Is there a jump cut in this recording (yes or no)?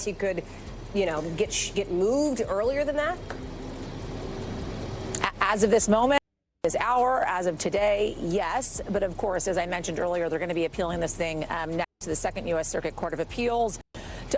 no